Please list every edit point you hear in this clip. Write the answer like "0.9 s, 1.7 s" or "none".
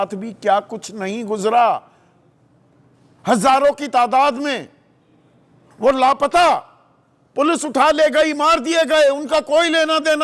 none

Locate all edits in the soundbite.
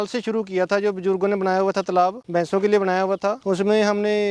2.2 s, 3.4 s

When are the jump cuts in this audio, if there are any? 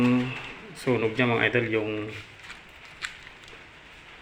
none

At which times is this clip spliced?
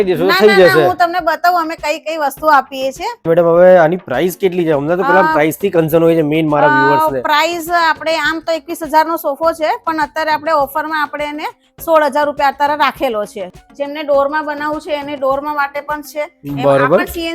3.3 s, 13.6 s

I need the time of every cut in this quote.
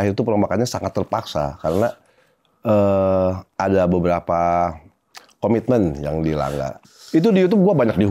6.9 s

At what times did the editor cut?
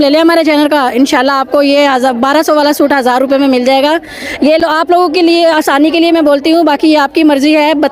none

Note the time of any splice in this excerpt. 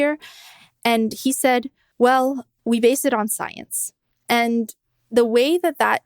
1.8 s, 2.5 s

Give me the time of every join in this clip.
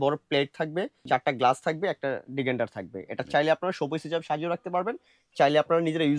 1.0 s

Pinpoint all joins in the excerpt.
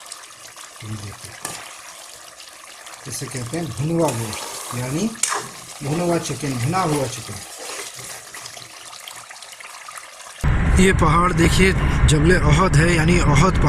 10.4 s

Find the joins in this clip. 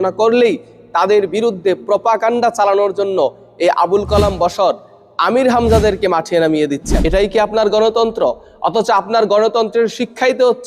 6.9 s

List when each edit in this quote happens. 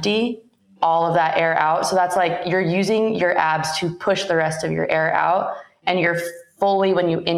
none

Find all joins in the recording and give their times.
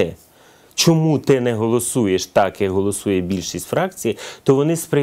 none

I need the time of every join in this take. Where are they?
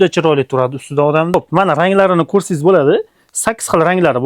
1.3 s

